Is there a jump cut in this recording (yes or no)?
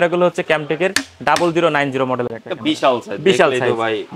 no